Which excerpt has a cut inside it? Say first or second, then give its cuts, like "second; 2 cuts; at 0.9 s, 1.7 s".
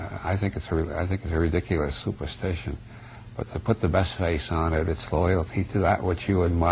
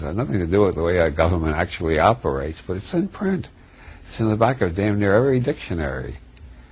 first; 1 cut; at 2.8 s